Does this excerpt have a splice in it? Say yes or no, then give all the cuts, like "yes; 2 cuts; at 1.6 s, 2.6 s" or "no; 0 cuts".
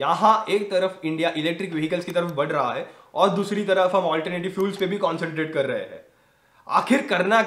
no; 0 cuts